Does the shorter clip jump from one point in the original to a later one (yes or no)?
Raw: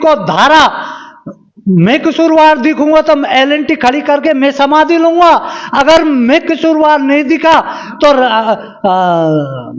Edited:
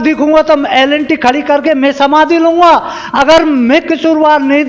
no